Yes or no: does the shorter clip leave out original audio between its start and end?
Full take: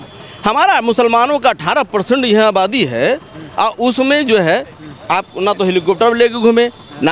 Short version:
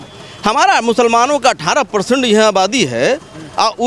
no